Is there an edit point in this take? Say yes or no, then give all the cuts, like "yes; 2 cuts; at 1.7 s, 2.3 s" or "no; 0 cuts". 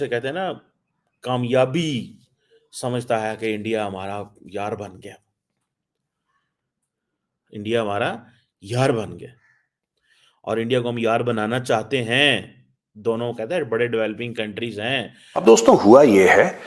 yes; 1 cut; at 15.4 s